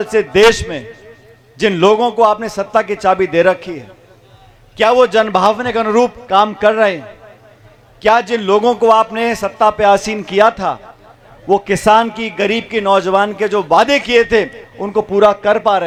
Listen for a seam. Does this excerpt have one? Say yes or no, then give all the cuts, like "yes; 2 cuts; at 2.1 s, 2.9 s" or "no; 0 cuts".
no; 0 cuts